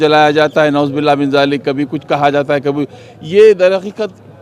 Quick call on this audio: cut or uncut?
uncut